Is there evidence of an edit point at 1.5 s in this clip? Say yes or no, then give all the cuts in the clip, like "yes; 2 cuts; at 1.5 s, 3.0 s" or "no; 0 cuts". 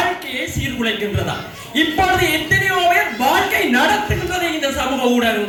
no; 0 cuts